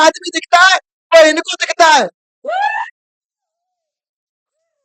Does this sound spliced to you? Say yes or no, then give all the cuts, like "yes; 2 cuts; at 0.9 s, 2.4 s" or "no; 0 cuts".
no; 0 cuts